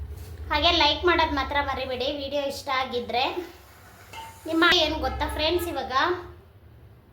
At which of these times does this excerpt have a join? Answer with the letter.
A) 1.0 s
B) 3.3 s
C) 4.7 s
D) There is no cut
C